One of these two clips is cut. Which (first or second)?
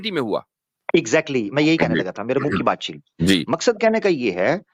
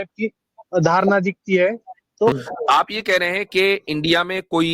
second